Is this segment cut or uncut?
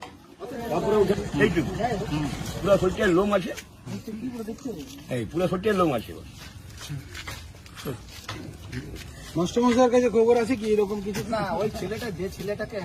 cut